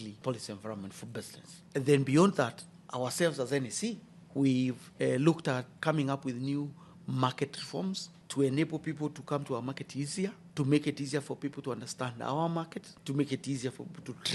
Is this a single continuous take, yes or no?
yes